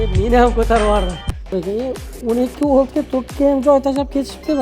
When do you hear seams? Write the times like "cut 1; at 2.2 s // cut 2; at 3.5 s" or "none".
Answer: cut 1; at 1.6 s